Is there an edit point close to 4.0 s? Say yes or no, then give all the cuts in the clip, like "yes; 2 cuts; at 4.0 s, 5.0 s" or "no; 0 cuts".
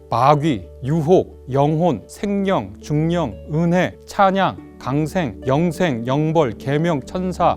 yes; 4 cuts; at 1.2 s, 2.1 s, 4.0 s, 5.3 s